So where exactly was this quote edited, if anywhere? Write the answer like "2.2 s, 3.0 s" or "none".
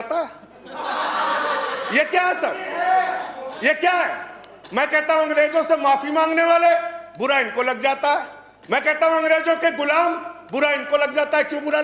none